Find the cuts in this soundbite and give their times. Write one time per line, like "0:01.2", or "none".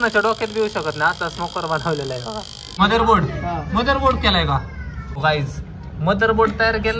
0:02.8
0:05.2